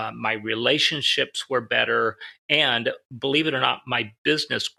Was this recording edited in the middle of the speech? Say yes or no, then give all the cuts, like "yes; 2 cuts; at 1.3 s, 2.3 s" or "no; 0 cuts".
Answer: no; 0 cuts